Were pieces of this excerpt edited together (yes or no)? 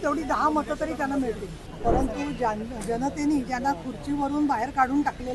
yes